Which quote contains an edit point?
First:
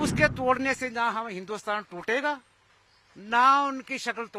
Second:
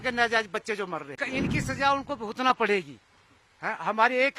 second; 1 cut; at 1.2 s

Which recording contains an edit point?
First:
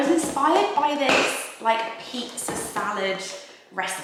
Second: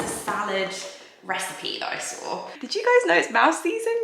second; 1 cut; at 2.5 s

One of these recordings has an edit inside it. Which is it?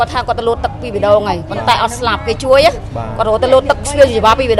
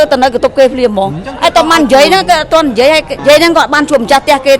second; 1 cut; at 3.1 s

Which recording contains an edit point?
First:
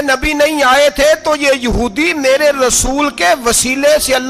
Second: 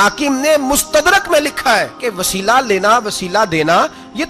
second; 1 cut; at 2.0 s

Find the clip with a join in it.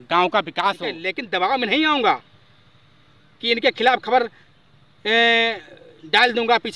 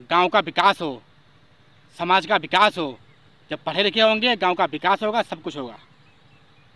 first; 1 cut; at 1.1 s

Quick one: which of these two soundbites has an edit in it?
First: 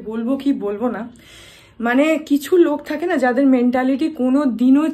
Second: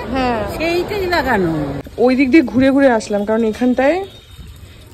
second; 1 cut; at 1.9 s

